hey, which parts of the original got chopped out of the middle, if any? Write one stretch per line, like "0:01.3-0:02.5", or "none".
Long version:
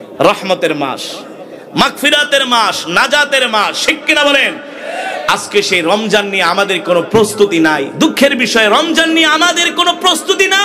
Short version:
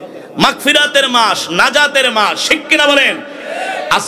none